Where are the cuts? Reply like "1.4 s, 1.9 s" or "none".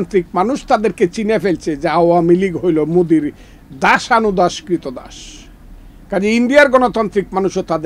none